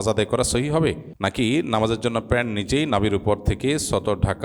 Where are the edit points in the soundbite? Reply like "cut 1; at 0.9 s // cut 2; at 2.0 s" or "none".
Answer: cut 1; at 1.1 s